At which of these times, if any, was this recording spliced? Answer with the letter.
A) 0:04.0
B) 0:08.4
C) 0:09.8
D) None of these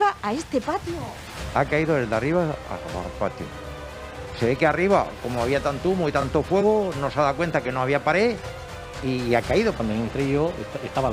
C